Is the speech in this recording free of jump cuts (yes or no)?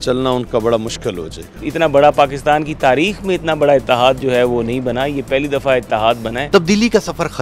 no